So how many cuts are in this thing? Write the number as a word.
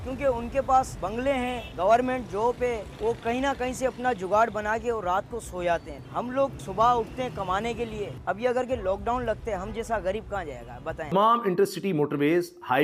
one